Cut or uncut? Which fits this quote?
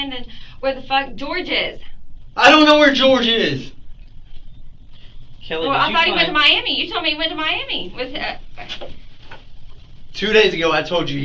uncut